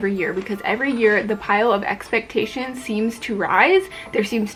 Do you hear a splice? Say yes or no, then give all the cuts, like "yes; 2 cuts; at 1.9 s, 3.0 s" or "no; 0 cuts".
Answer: no; 0 cuts